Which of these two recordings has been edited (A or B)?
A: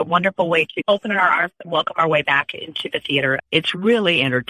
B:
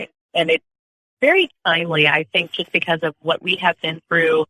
A